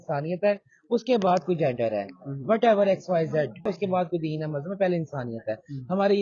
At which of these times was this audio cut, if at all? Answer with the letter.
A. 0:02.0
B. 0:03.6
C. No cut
B